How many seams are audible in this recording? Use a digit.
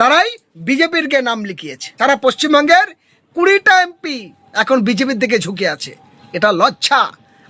1